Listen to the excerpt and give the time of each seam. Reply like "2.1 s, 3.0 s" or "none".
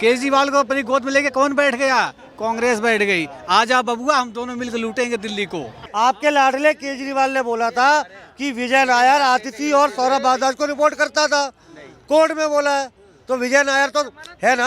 5.8 s